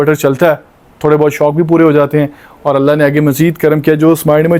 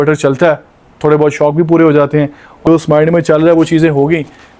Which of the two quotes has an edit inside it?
second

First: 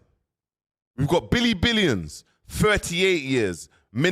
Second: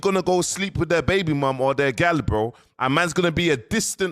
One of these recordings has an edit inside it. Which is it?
second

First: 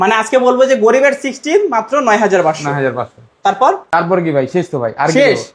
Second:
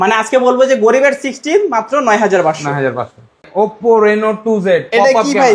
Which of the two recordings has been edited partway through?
second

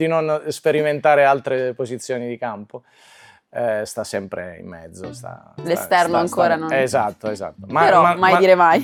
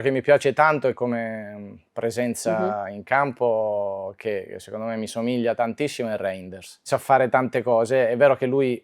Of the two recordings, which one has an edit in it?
second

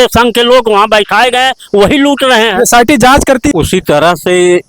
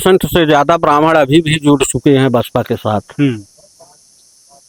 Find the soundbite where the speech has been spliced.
first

